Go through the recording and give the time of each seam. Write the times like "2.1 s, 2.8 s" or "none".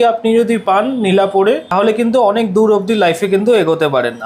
1.7 s